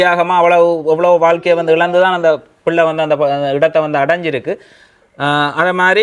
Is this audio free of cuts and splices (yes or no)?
yes